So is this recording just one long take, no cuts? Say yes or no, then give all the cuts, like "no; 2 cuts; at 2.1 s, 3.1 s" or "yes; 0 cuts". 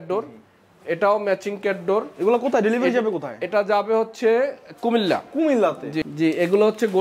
no; 1 cut; at 6.0 s